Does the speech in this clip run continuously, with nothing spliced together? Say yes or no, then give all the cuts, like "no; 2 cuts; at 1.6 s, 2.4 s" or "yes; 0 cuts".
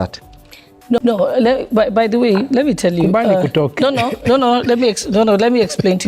yes; 0 cuts